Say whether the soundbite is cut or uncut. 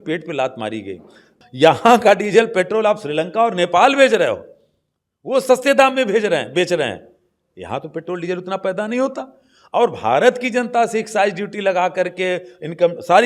cut